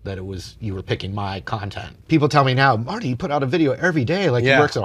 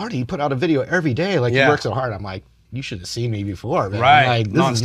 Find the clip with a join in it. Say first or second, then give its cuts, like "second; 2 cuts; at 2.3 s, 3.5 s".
first; 1 cut; at 2.0 s